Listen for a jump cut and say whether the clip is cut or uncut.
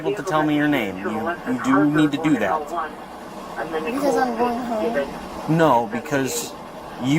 uncut